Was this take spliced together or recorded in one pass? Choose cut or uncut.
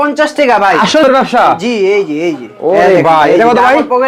cut